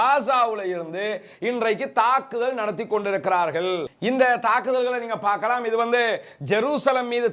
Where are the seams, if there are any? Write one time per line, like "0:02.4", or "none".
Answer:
none